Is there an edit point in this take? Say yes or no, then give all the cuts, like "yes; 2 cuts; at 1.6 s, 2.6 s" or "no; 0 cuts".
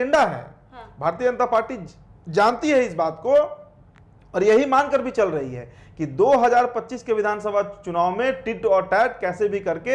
no; 0 cuts